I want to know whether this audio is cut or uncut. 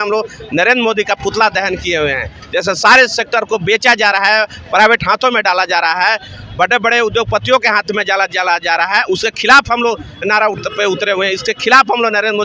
uncut